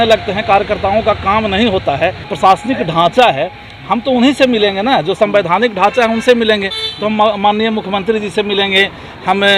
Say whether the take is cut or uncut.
cut